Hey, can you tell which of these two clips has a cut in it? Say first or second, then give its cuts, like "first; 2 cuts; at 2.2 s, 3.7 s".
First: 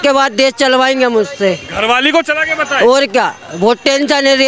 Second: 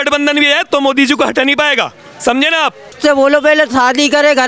second; 1 cut; at 3.0 s